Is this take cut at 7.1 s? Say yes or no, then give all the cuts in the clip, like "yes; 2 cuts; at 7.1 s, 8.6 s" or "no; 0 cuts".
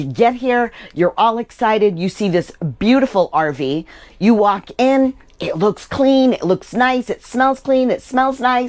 no; 0 cuts